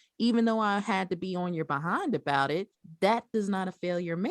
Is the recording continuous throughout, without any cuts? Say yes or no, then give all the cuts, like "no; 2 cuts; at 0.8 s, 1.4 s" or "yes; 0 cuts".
no; 1 cut; at 2.8 s